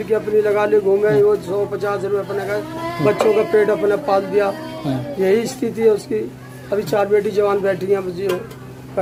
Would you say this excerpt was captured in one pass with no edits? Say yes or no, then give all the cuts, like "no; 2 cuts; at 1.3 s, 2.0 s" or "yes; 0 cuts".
yes; 0 cuts